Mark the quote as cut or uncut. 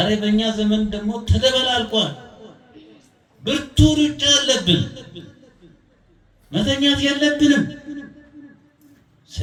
uncut